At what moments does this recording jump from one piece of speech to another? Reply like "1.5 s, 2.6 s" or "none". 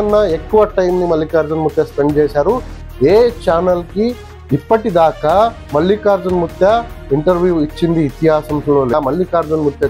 8.9 s